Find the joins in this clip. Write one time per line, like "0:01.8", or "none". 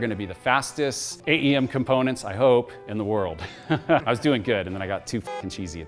0:04.0

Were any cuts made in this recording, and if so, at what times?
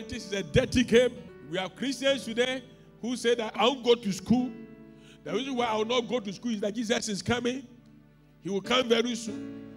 0:01.3
0:03.6

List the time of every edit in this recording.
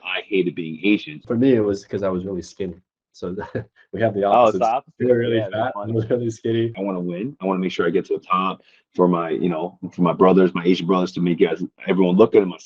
0:01.2
0:06.8

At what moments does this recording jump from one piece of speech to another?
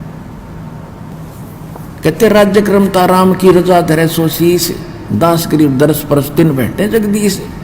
0:01.1

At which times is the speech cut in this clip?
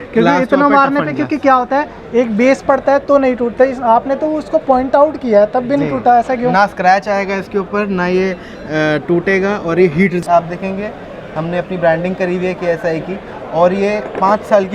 0:10.2

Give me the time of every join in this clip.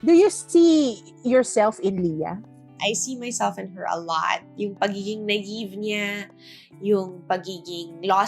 0:02.6

